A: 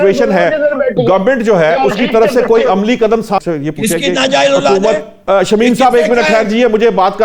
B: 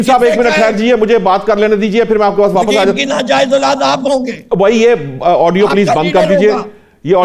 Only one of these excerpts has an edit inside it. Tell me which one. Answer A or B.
A